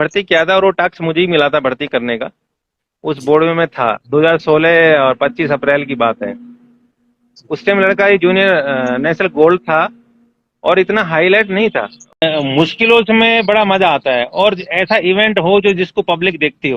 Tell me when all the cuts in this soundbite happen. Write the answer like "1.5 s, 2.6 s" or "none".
12.2 s